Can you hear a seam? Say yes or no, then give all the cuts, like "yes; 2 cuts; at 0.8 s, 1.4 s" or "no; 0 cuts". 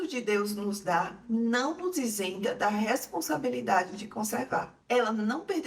yes; 1 cut; at 4.7 s